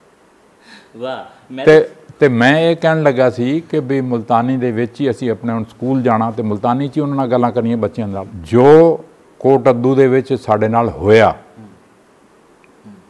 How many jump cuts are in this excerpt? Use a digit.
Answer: 1